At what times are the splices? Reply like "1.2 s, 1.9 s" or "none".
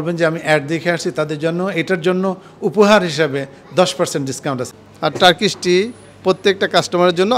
4.6 s